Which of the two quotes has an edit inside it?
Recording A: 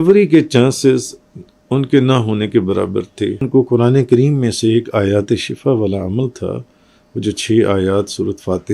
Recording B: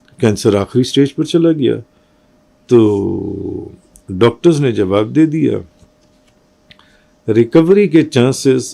A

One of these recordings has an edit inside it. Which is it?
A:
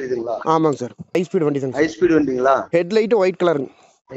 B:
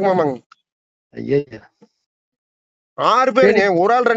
A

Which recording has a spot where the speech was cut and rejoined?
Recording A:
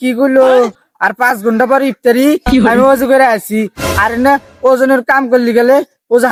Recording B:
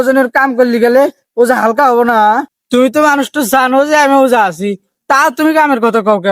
B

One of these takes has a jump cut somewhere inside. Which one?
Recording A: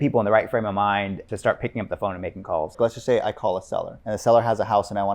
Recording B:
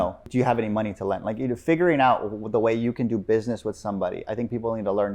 A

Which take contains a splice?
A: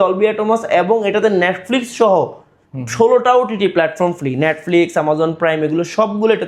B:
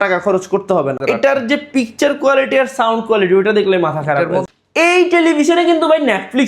B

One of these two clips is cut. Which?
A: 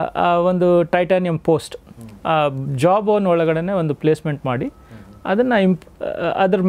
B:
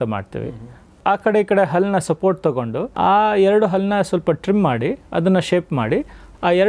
B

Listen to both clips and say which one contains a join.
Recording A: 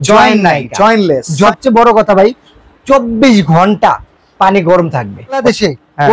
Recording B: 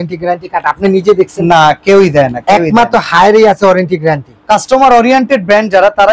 A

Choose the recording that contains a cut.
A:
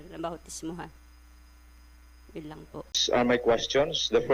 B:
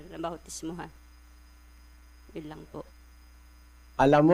A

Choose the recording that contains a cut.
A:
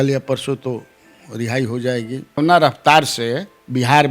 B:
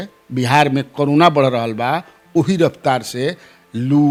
A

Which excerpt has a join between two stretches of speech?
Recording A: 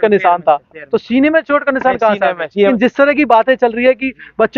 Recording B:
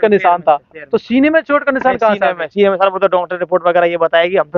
A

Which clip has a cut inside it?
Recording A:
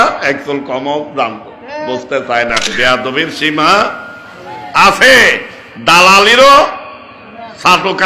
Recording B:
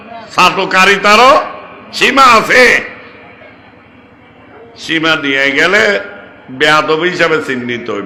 A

